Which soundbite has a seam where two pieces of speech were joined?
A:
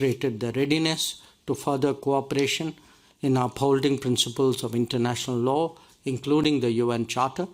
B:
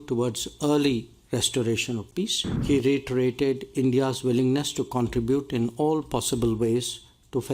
B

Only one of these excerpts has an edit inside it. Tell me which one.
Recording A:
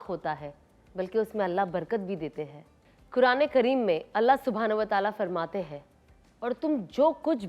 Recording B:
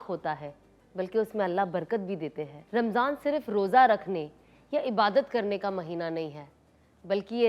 B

